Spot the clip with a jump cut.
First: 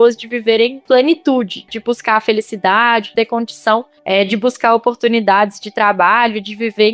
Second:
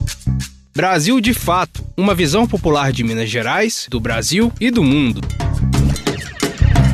first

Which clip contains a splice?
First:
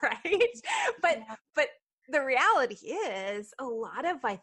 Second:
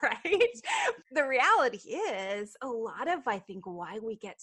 second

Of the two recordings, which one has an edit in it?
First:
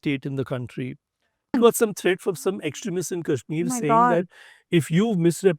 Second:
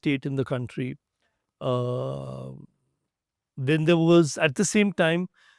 first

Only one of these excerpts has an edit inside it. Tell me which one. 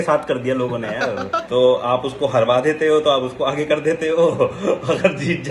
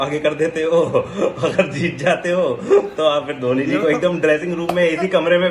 first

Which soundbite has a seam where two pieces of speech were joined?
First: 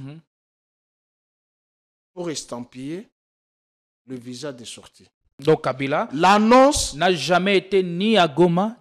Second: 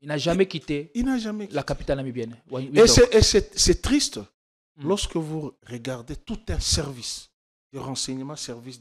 first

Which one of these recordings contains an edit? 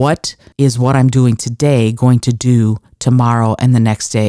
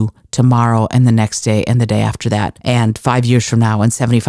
second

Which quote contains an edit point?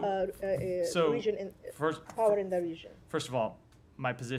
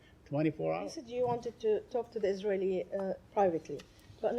second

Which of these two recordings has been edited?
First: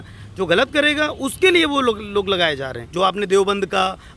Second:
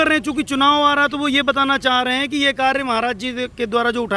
first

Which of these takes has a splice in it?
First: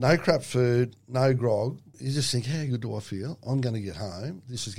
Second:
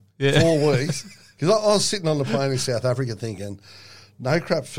first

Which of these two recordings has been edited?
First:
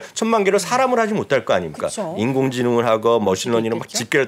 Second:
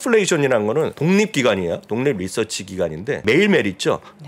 second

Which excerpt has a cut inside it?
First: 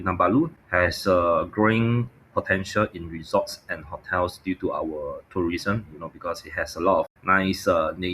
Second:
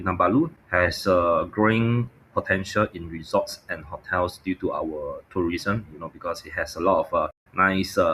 first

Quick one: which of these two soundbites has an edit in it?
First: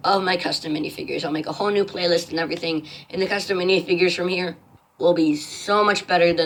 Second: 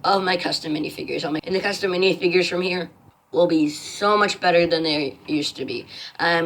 second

